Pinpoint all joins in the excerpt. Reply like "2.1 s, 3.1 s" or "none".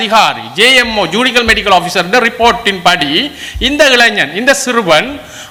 none